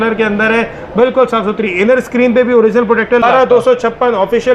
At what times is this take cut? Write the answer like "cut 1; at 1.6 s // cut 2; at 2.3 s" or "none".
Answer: cut 1; at 3.2 s